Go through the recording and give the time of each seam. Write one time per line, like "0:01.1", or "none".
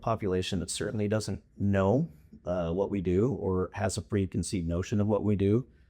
0:01.4